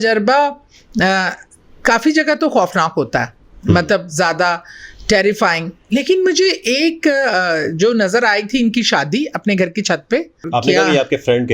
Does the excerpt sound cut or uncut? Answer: cut